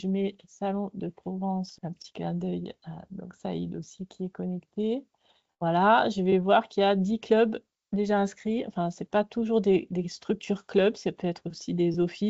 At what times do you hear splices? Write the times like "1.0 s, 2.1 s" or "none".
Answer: 1.8 s